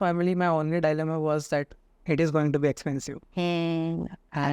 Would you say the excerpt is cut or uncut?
uncut